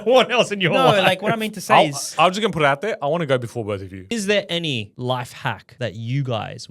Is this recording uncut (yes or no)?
no